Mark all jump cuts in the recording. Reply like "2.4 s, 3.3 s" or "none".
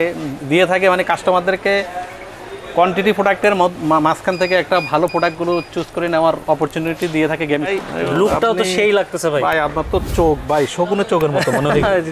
7.7 s